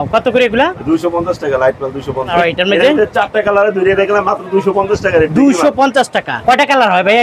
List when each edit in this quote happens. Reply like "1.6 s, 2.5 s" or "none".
2.3 s, 6.5 s